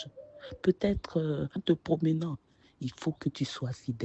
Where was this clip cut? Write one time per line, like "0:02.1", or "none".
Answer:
0:01.5